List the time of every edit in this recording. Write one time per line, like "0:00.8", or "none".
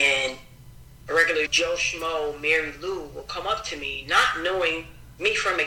0:01.5